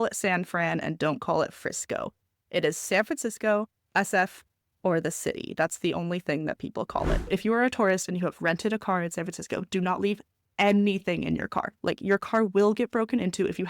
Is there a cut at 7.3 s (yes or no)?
yes